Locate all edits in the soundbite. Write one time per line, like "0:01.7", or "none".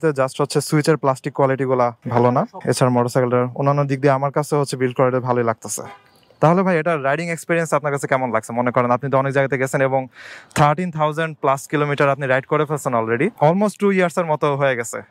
0:02.0